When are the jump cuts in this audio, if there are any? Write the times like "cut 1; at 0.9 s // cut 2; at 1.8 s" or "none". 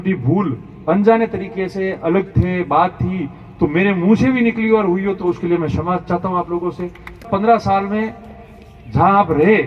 cut 1; at 7.3 s